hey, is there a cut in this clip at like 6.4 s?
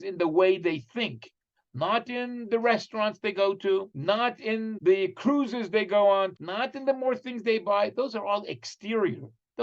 yes; 2 cuts; at 4.4 s, 6.4 s

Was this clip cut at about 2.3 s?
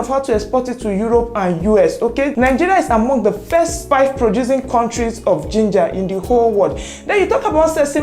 yes; 2 cuts; at 2.3 s, 3.8 s

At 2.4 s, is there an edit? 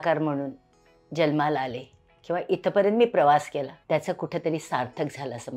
no; 1 cut; at 3.8 s

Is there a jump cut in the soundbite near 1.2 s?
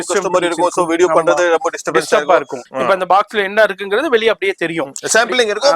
no; 1 cut; at 2.6 s

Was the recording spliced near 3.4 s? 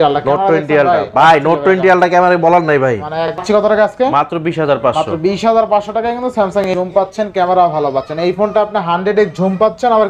yes; 2 cuts; at 3.4 s, 6.7 s

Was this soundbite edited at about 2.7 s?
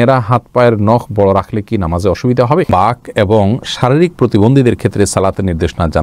yes; 1 cut; at 2.7 s

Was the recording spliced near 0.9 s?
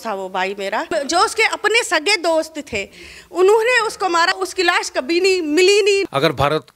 yes; 3 cuts; at 0.9 s, 4.4 s, 6.0 s

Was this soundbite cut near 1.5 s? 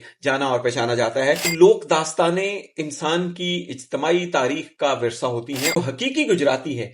yes; 2 cuts; at 1.5 s, 5.8 s

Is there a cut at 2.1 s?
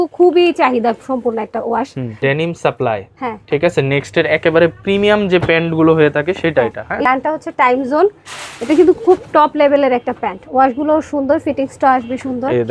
yes; 2 cuts; at 2.1 s, 7.1 s

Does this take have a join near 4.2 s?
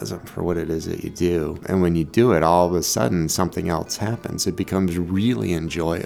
no; 1 cut; at 1.6 s

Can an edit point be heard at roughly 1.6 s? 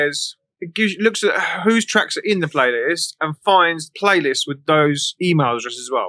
no; 2 cuts; at 3.8 s, 5.1 s

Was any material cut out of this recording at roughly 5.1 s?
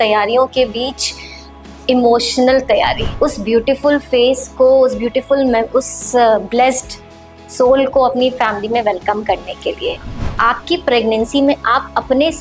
no; 2 cuts; at 3.0 s, 10.3 s

